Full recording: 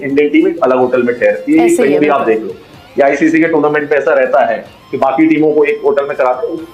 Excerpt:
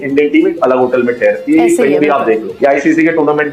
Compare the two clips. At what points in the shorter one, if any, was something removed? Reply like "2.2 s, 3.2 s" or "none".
2.5 s